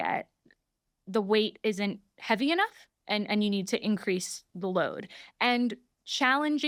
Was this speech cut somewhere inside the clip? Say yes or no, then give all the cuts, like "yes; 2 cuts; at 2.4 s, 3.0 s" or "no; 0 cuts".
no; 0 cuts